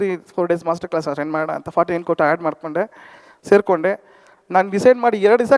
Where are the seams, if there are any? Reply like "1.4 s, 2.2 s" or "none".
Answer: none